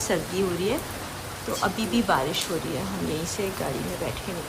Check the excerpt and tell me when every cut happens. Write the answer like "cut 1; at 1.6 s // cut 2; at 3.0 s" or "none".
none